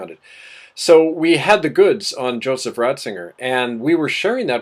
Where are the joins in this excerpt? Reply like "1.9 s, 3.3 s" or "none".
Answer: none